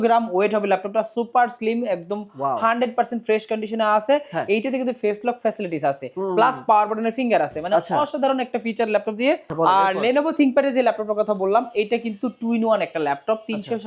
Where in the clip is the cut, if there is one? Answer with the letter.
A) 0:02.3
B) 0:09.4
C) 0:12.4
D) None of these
B